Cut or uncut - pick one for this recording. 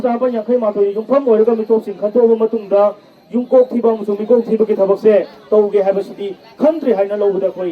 uncut